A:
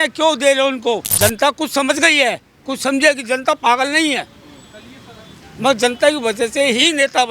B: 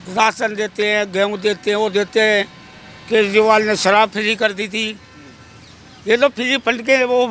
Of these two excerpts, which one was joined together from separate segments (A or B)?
A